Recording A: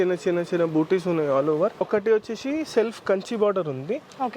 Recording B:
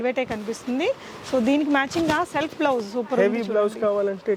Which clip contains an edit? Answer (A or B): A